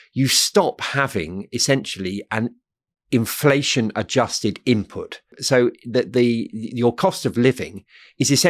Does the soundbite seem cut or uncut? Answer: cut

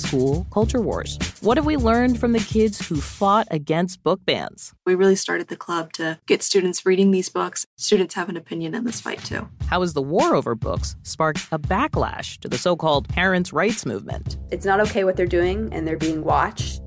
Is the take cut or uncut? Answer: uncut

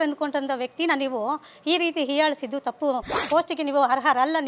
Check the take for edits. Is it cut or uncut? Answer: cut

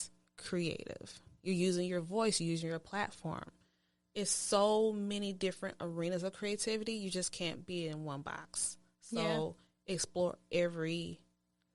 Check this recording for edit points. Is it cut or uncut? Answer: uncut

